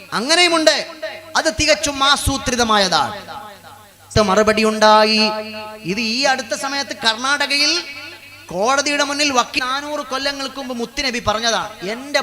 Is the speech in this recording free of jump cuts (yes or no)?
no